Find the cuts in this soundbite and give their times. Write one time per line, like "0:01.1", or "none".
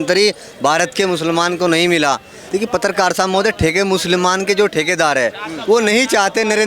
0:02.3